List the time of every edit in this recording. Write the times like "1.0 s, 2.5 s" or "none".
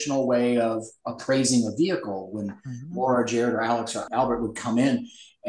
4.0 s